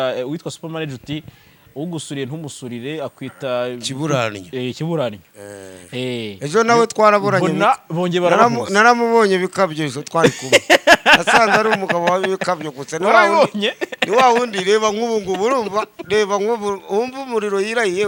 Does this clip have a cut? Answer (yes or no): no